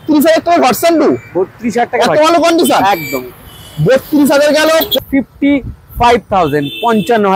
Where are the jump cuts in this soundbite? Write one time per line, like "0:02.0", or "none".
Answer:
0:05.0

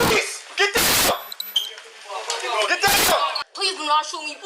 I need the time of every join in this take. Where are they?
0:03.4

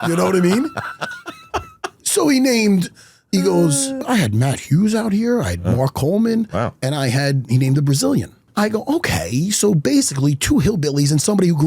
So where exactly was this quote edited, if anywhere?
0:04.1
0:08.4

